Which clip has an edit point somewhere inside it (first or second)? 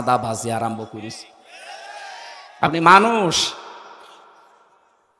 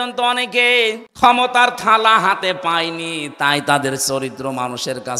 second